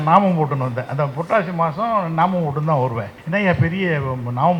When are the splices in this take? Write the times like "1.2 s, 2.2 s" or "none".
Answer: 3.1 s